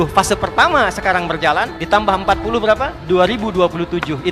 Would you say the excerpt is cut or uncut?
cut